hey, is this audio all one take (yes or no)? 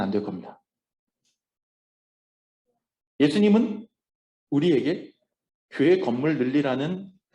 yes